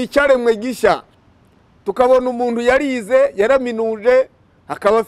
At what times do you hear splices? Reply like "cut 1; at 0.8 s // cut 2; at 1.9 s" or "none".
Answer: cut 1; at 1.2 s